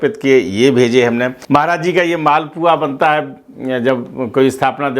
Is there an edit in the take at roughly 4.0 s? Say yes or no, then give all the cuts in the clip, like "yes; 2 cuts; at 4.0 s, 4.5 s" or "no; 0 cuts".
no; 1 cut; at 1.4 s